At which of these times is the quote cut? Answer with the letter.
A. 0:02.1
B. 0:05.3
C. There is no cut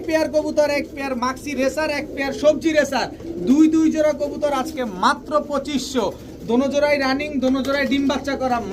C